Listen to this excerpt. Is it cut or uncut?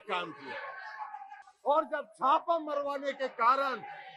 uncut